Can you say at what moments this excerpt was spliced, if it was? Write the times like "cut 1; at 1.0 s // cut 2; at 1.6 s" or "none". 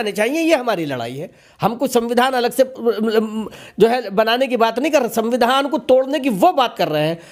none